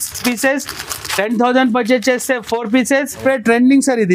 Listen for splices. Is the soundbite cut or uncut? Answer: cut